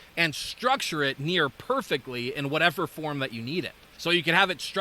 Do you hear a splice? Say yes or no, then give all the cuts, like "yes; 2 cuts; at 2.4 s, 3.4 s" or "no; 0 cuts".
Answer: yes; 1 cut; at 3.8 s